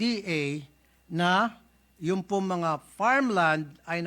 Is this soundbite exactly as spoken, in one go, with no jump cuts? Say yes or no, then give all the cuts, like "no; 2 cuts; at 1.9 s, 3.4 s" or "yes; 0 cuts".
yes; 0 cuts